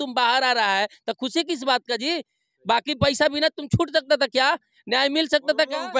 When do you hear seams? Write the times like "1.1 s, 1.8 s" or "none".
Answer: none